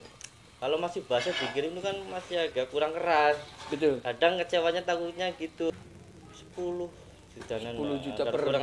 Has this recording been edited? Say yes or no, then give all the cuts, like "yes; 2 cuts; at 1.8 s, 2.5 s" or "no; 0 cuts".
yes; 1 cut; at 5.7 s